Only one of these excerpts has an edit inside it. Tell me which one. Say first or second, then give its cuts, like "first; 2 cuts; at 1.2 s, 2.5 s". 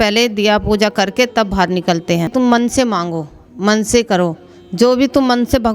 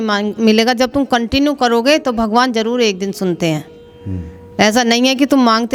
first; 1 cut; at 2.3 s